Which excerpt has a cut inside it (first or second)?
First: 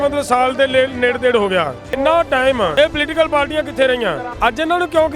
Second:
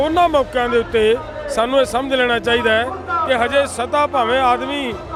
first